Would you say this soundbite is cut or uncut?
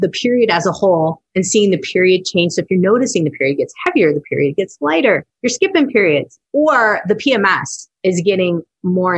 cut